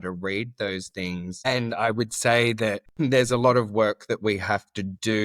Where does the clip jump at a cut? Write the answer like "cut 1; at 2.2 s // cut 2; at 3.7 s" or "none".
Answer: cut 1; at 1.4 s // cut 2; at 2.9 s

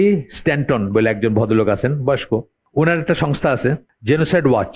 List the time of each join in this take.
cut 1; at 2.6 s // cut 2; at 3.9 s

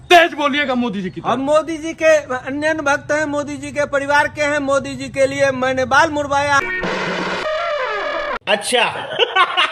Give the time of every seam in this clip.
none

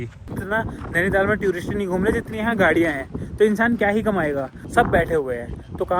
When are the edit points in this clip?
cut 1; at 4.6 s

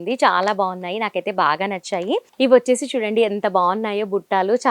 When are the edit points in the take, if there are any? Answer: cut 1; at 2.3 s

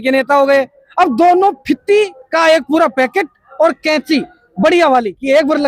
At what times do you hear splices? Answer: none

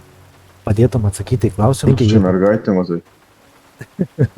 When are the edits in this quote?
cut 1; at 1.8 s

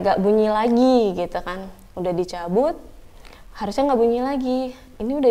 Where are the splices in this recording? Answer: none

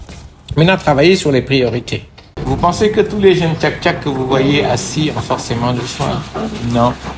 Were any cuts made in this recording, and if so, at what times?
cut 1; at 2.3 s

